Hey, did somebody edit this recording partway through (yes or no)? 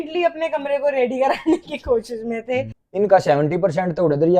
yes